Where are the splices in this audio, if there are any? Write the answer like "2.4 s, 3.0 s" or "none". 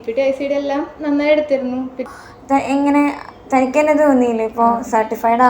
2.1 s